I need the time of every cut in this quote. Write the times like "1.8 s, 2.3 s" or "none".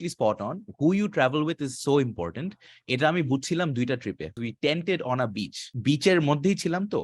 4.4 s, 5.7 s